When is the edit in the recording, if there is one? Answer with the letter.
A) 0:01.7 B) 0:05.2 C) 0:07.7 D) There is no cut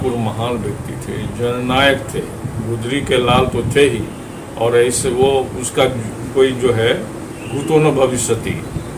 D